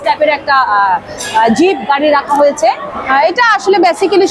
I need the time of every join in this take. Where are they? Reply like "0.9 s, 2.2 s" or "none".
2.9 s